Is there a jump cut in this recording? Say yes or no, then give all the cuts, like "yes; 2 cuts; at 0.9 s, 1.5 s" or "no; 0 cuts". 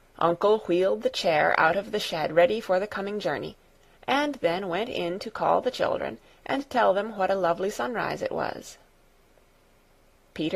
no; 0 cuts